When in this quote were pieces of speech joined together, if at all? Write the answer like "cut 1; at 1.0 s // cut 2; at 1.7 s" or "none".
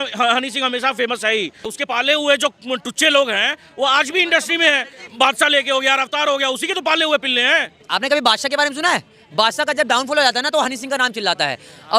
cut 1; at 1.7 s // cut 2; at 5.0 s // cut 3; at 7.8 s